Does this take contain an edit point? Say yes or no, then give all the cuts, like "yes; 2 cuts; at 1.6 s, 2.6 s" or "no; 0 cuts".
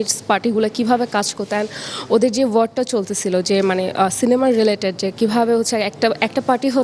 no; 0 cuts